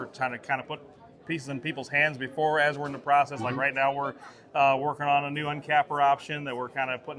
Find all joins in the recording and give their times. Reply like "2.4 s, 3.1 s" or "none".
none